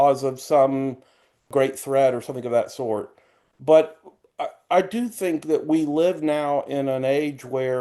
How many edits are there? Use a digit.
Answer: 1